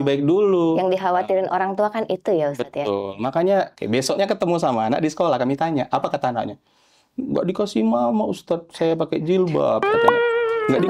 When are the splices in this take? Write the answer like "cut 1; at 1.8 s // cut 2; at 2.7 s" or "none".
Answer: cut 1; at 3.8 s